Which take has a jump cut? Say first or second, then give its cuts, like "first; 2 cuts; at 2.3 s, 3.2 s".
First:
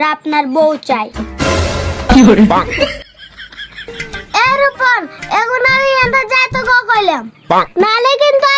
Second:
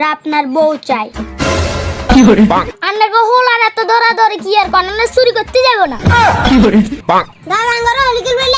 second; 2 cuts; at 2.7 s, 7.0 s